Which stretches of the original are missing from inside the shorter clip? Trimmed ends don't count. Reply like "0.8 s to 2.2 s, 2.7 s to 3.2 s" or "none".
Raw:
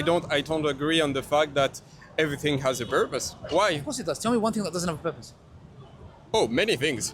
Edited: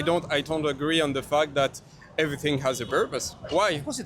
none